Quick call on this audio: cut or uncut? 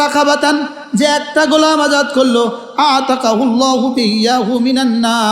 uncut